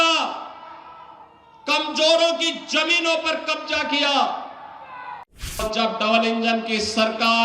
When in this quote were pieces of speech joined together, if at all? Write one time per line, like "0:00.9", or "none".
0:05.6